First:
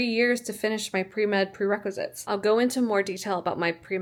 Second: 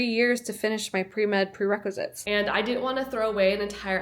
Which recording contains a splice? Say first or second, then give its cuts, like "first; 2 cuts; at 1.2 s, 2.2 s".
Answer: second; 1 cut; at 2.2 s